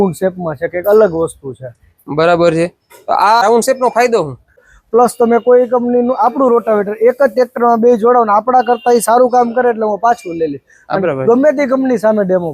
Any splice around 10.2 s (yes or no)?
no